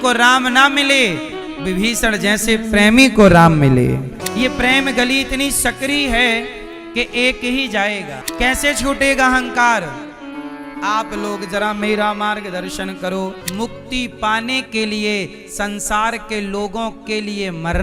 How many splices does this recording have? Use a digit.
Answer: 3